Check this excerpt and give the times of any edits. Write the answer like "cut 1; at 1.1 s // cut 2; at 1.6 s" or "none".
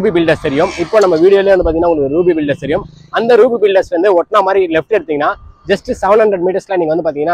none